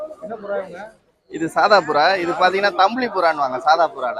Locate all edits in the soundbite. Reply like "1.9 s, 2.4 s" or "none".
none